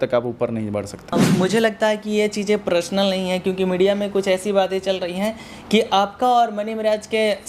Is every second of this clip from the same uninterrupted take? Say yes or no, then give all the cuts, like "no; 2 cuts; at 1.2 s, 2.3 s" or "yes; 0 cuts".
no; 1 cut; at 1.1 s